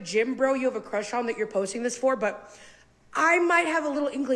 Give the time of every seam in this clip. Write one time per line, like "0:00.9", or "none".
0:01.5